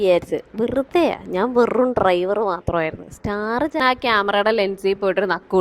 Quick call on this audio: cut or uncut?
cut